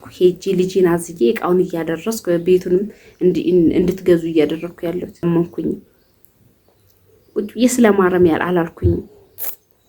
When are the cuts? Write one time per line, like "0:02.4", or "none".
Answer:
0:05.2

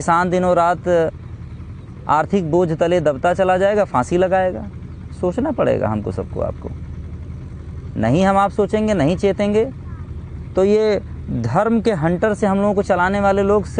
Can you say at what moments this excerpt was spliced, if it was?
none

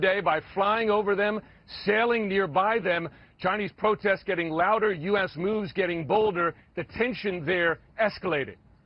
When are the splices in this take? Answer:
0:06.0

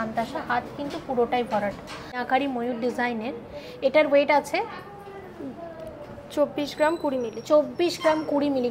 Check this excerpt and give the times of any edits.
0:02.2

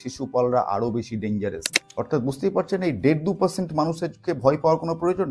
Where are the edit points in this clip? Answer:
0:01.8

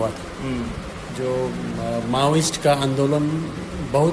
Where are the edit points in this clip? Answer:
none

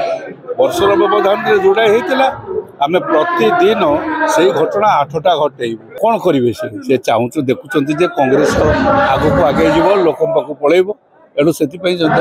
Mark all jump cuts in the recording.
0:06.0

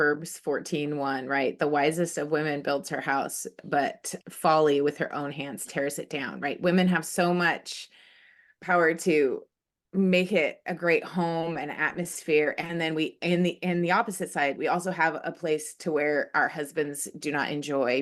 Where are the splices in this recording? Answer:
none

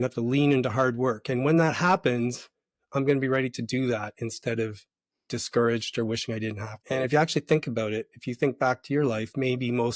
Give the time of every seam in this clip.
none

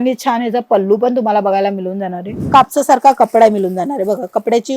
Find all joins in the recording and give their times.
0:02.3

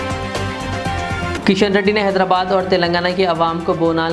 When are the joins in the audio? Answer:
0:01.3

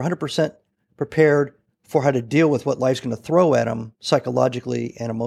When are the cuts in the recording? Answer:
none

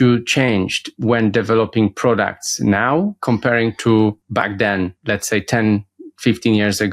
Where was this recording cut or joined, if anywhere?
0:00.9
0:04.8

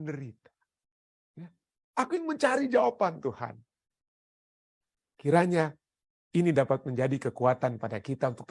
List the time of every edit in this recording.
0:04.3

